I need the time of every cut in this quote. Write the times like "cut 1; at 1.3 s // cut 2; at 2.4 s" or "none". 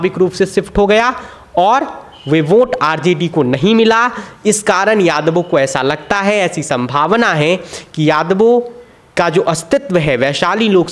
none

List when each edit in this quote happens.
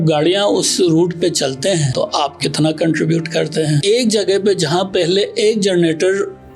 cut 1; at 1.9 s // cut 2; at 3.8 s

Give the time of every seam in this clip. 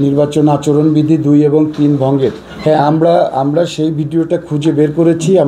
cut 1; at 2.5 s

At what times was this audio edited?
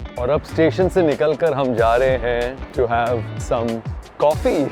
cut 1; at 2.6 s // cut 2; at 3.3 s

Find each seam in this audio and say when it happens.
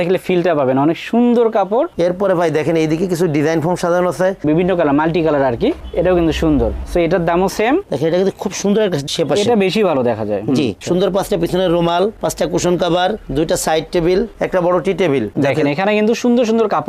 cut 1; at 1.9 s // cut 2; at 4.4 s // cut 3; at 7.9 s // cut 4; at 10.8 s // cut 5; at 15.3 s

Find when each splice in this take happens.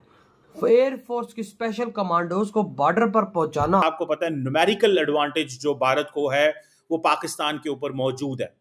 cut 1; at 3.8 s

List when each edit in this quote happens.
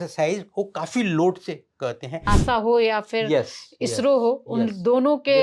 cut 1; at 2.2 s

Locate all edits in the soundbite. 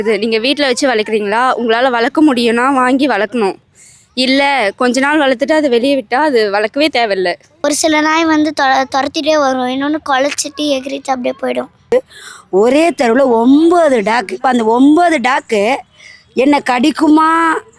cut 1; at 7.5 s // cut 2; at 11.9 s // cut 3; at 14.4 s

